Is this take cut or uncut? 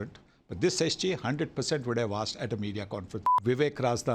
cut